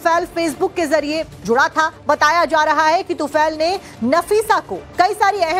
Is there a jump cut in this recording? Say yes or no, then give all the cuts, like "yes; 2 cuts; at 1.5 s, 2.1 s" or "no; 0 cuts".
no; 0 cuts